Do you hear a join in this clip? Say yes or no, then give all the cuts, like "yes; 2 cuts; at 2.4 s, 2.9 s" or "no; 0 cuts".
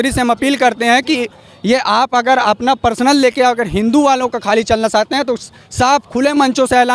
no; 0 cuts